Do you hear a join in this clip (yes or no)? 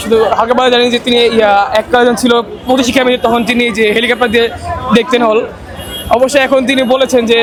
no